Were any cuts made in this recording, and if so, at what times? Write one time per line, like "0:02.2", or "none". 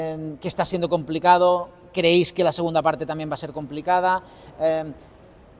none